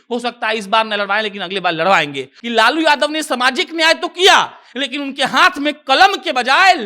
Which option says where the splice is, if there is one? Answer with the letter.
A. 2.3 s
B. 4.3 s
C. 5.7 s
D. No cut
A